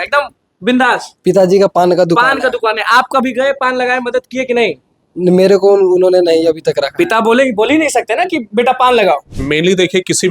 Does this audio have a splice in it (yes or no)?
yes